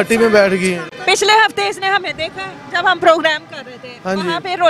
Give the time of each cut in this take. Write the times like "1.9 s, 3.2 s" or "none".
none